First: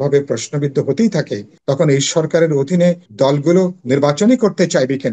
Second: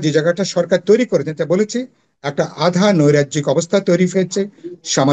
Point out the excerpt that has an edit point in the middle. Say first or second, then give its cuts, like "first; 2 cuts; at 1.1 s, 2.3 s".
first; 2 cuts; at 1.4 s, 3.1 s